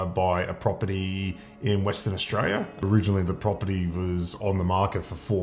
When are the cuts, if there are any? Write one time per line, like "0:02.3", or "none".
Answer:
0:02.7